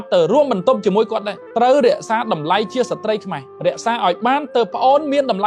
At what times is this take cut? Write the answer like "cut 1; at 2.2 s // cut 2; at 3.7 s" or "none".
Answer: none